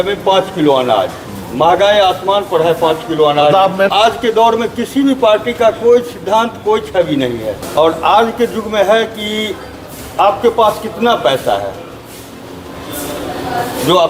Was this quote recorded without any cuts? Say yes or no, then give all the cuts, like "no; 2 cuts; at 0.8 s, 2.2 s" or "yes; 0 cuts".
no; 2 cuts; at 3.9 s, 7.6 s